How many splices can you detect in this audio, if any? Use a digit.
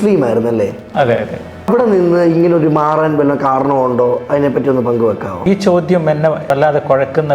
3